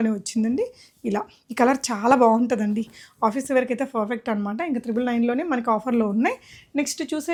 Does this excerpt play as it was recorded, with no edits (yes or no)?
yes